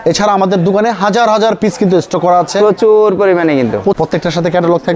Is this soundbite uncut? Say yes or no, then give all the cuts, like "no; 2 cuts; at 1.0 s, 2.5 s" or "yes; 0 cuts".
no; 1 cut; at 4.0 s